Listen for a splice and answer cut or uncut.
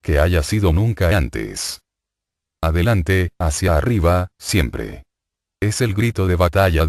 uncut